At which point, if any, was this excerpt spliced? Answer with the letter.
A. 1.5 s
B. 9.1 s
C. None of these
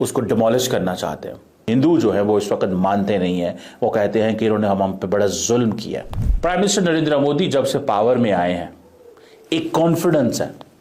A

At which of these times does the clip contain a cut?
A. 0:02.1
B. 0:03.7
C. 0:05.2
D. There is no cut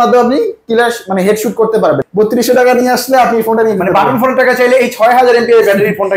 A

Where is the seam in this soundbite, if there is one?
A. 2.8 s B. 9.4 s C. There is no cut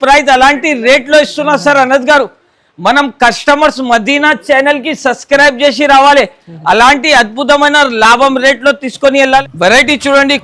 B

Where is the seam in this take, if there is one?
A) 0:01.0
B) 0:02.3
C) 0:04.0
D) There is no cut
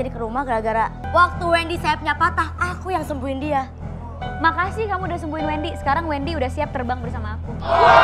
A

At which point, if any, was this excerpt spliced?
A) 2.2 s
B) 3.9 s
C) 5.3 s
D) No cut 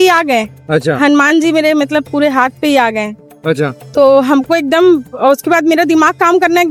D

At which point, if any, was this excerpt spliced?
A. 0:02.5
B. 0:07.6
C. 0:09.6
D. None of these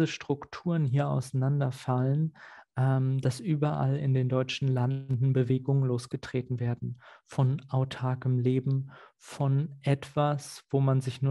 D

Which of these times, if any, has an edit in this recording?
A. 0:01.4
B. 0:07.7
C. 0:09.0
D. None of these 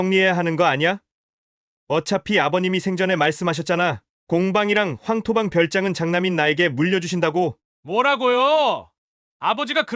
B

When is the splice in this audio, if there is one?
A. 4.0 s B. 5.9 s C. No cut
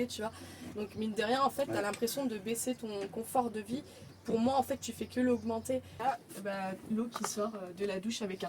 B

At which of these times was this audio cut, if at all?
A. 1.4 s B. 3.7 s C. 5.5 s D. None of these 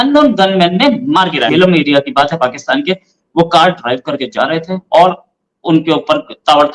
A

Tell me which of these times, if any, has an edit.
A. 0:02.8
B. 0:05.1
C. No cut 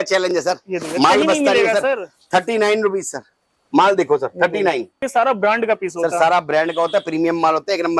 B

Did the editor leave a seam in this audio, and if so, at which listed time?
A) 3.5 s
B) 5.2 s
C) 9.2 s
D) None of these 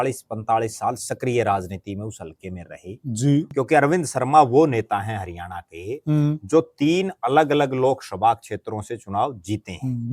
A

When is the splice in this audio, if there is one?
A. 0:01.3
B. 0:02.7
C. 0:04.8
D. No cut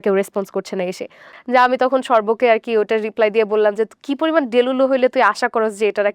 A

